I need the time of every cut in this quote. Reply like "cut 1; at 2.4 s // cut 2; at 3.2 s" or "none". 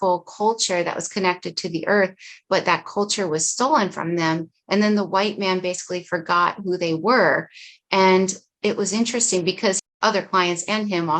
cut 1; at 9.8 s